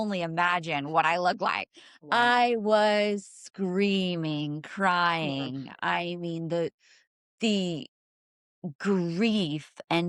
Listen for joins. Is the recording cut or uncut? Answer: uncut